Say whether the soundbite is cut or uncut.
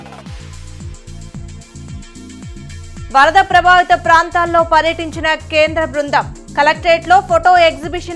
uncut